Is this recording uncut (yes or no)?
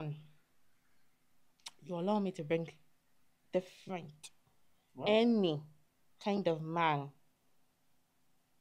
yes